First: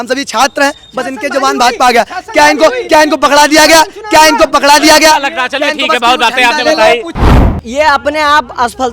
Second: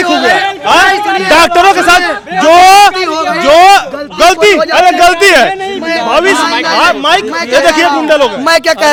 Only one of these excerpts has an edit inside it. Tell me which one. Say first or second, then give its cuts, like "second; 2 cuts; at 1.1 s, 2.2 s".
first; 1 cut; at 7.3 s